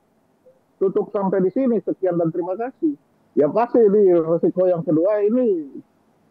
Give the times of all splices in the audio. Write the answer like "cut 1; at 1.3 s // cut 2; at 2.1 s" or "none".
cut 1; at 3.1 s